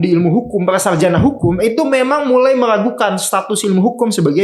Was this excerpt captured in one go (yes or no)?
yes